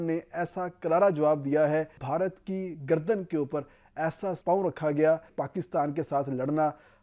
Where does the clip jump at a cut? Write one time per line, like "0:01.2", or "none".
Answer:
0:02.0
0:05.3